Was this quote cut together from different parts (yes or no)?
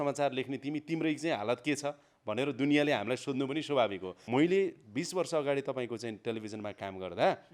yes